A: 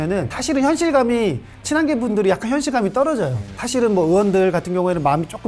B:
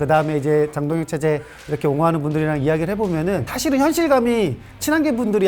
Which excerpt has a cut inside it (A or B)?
A